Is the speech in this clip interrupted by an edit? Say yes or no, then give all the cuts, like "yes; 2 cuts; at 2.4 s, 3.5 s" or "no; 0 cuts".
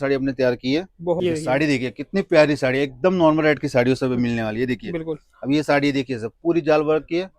yes; 1 cut; at 1.2 s